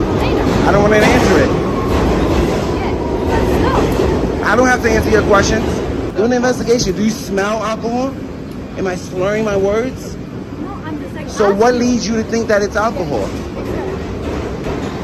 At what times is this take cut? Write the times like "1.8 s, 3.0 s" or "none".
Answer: 6.1 s